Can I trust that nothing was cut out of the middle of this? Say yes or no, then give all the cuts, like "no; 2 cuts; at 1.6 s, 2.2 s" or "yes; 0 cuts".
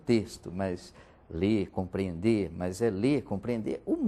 yes; 0 cuts